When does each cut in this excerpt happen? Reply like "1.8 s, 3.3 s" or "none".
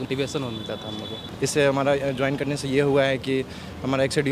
1.3 s